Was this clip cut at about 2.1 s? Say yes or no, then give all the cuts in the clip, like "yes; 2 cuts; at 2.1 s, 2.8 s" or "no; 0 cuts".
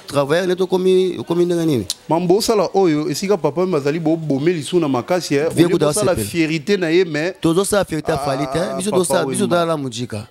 no; 0 cuts